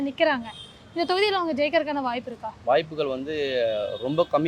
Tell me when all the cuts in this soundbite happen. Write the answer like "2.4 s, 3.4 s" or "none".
none

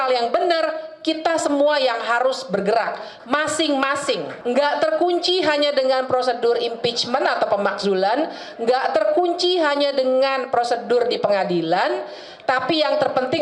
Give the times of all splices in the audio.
4.4 s

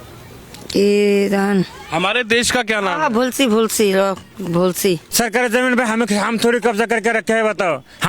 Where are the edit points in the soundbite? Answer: 5.1 s

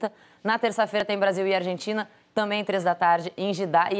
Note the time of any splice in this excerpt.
1.0 s

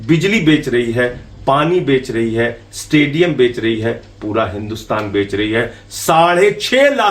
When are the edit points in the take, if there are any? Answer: none

